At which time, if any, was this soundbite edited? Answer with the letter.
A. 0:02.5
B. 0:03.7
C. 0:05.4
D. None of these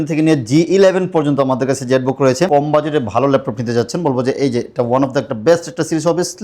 A